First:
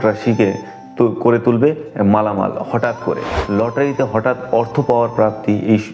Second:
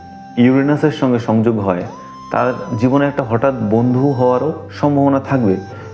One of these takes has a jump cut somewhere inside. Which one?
first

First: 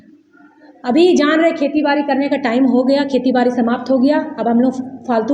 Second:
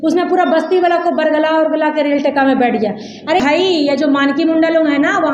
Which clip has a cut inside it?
second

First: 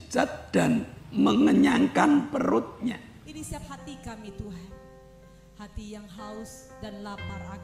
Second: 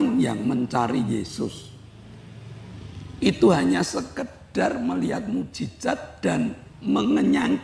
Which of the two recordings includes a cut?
first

